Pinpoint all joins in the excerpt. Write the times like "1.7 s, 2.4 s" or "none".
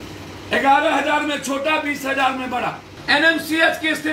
2.9 s